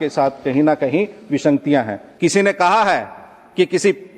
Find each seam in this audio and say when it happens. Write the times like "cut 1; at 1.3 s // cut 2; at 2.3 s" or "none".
cut 1; at 2.0 s